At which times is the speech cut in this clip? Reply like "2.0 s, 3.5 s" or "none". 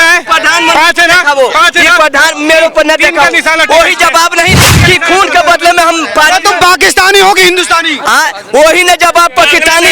none